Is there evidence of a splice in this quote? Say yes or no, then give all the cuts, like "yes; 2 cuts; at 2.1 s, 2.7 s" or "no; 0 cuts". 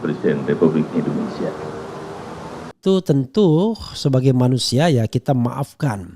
yes; 1 cut; at 2.7 s